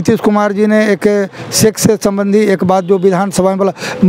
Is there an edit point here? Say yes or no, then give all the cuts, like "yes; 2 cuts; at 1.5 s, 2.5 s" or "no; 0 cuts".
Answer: no; 0 cuts